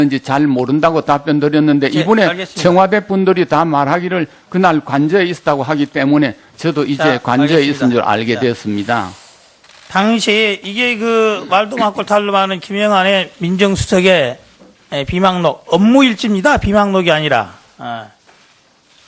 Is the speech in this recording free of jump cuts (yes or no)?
yes